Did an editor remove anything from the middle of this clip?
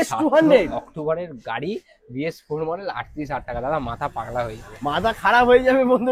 no; 0 cuts

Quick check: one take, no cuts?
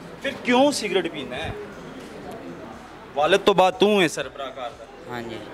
no; 1 cut; at 2.7 s

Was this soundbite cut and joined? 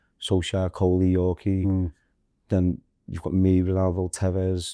no; 0 cuts

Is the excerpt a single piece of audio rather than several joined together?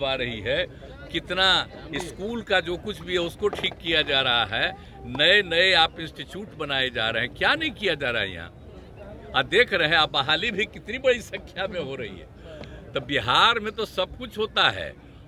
yes; 0 cuts

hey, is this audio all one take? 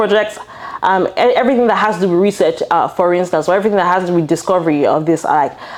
yes; 0 cuts

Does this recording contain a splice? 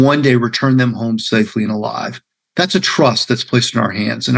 no; 0 cuts

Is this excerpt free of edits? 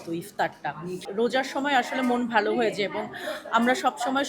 no; 1 cut; at 1.0 s

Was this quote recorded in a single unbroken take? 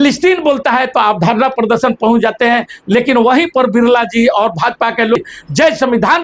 no; 1 cut; at 5.2 s

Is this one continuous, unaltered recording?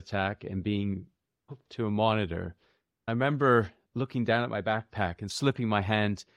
no; 3 cuts; at 3.1 s, 3.8 s, 5.3 s

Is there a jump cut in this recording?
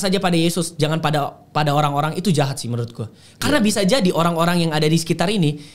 no; 0 cuts

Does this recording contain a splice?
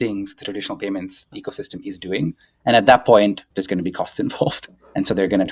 yes; 2 cuts; at 1.4 s, 3.4 s

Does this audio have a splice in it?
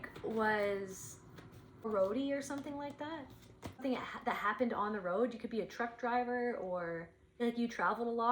yes; 3 cuts; at 1.9 s, 3.8 s, 7.2 s

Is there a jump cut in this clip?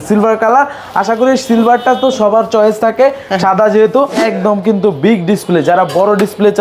yes; 1 cut; at 4.2 s

